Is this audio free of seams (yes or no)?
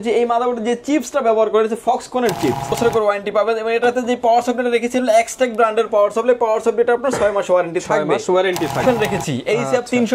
no